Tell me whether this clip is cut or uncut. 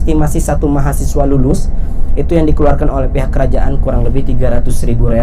uncut